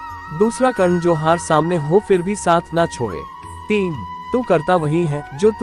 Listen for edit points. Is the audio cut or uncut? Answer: cut